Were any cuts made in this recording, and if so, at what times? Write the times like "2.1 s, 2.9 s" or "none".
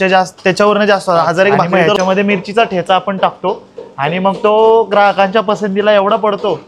1.8 s